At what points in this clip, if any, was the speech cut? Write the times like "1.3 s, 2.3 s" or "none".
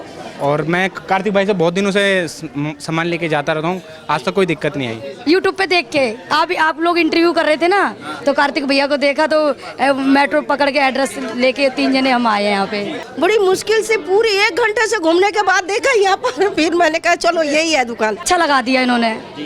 5.1 s, 13.0 s, 18.2 s